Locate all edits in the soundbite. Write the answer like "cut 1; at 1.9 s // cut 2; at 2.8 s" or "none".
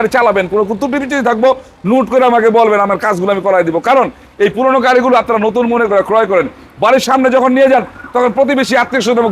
none